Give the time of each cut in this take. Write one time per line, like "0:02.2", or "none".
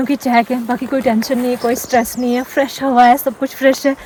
none